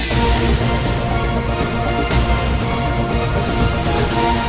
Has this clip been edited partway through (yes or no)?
no